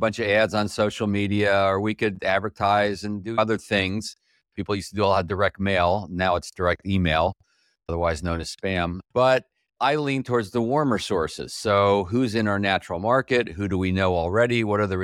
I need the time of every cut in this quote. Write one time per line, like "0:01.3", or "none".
0:09.0